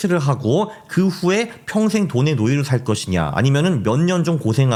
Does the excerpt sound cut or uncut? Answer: uncut